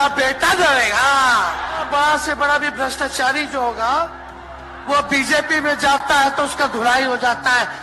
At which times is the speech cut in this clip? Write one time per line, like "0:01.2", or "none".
0:01.8